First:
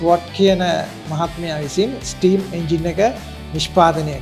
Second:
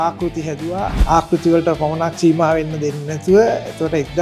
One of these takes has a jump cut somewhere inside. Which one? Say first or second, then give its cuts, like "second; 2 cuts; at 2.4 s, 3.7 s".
second; 1 cut; at 1.0 s